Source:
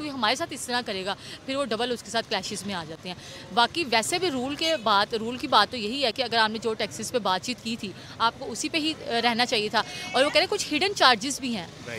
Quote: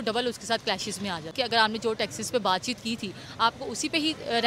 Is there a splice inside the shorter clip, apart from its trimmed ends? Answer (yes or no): yes